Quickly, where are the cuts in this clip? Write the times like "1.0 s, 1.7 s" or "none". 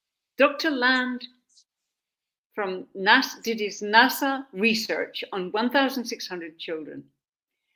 none